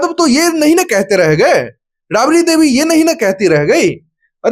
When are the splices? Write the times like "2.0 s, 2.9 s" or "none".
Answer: none

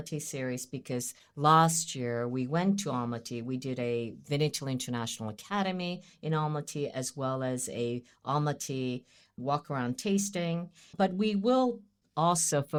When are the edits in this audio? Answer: none

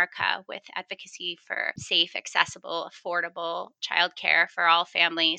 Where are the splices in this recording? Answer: 1.8 s

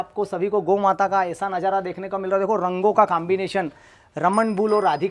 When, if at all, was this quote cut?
none

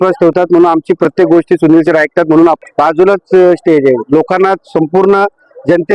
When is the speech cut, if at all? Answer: 2.6 s

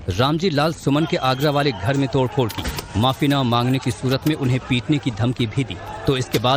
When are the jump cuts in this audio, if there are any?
4.9 s

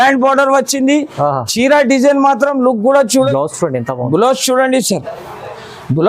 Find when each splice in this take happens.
3.3 s

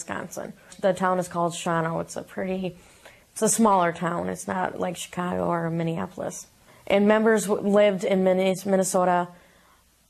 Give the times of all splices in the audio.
2.6 s

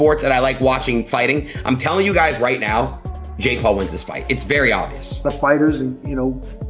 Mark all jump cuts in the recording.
5.2 s

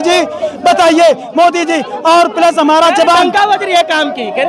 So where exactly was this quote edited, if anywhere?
none

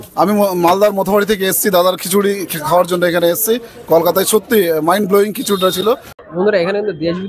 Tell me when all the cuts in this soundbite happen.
6.1 s

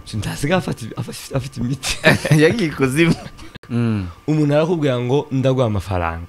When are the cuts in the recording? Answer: 3.4 s

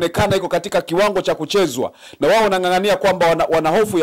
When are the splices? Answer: none

